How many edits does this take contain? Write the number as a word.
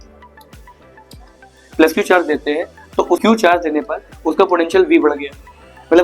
one